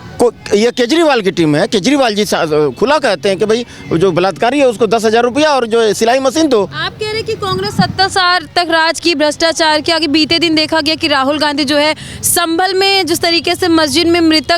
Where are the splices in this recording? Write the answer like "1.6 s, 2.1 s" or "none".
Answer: none